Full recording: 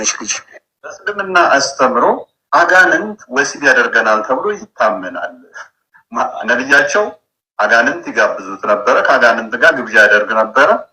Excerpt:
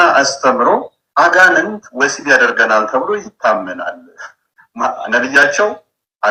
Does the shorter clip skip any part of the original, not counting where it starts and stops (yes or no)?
no